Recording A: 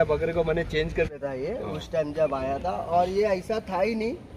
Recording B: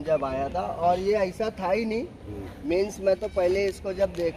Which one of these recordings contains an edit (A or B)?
A